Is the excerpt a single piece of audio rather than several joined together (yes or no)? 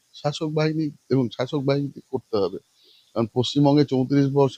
yes